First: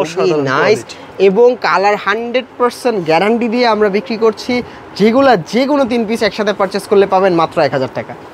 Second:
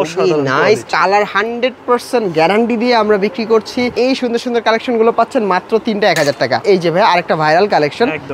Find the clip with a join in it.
second; 3 cuts; at 0.9 s, 3.9 s, 6.6 s

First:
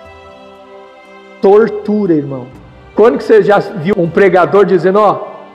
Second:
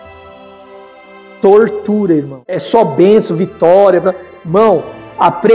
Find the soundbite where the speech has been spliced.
second; 1 cut; at 2.6 s

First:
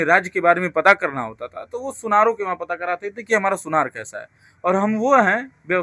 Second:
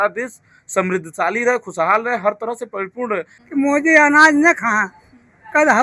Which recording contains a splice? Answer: second; 1 cut; at 3.3 s

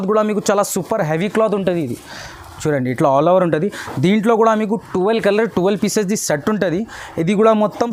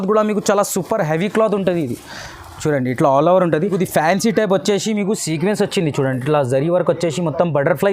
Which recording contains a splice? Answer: second; 1 cut; at 3.7 s

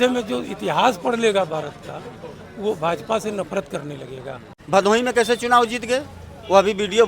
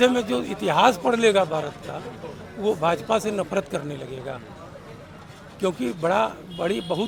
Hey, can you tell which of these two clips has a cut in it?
first; 1 cut; at 4.5 s

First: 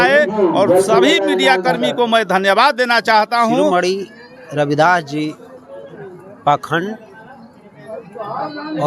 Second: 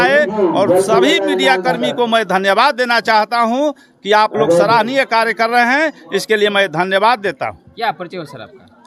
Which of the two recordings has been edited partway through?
first; 1 cut; at 3.7 s

